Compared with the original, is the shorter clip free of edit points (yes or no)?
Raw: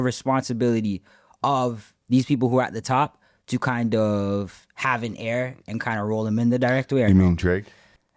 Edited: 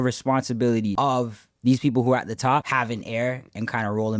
no